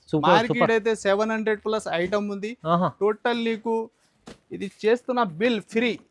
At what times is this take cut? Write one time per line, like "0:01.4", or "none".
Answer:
none